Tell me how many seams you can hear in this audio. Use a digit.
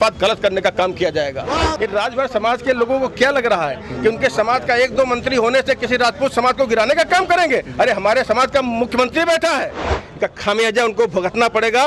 2